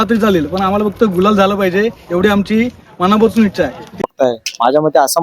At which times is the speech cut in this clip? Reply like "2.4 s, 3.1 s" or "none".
4.0 s